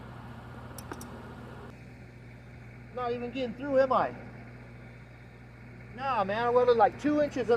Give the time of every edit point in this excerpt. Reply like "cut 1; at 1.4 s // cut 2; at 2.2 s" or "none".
cut 1; at 1.7 s